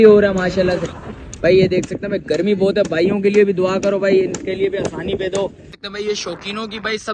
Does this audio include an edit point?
yes; 1 cut; at 5.7 s

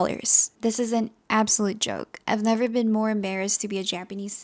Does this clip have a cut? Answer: no; 0 cuts

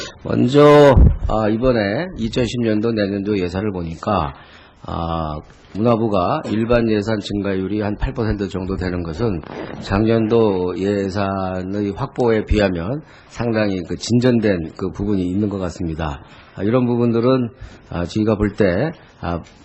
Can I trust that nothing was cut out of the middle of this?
yes; 0 cuts

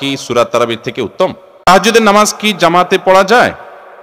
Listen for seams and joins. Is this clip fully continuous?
no; 1 cut; at 1.1 s

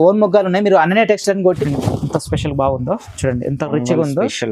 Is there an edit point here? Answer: yes; 1 cut; at 1.6 s

